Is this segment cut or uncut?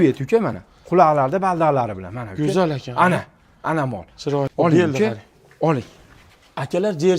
cut